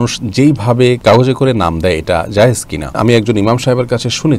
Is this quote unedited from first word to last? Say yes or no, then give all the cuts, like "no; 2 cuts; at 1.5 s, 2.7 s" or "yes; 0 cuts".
no; 2 cuts; at 1.0 s, 2.9 s